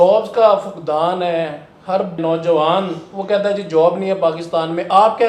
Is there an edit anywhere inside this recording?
no; 0 cuts

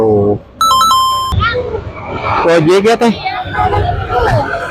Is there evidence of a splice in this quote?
yes; 1 cut; at 1.3 s

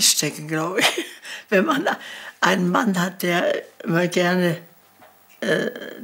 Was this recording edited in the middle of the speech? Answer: no; 0 cuts

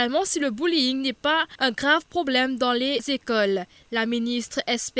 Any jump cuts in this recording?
yes; 1 cut; at 1.5 s

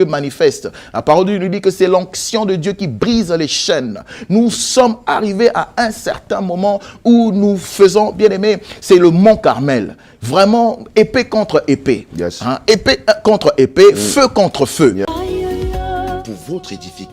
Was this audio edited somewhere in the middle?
yes; 1 cut; at 15.0 s

